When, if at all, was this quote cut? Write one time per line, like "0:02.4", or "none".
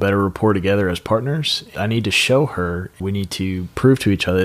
0:01.7
0:03.0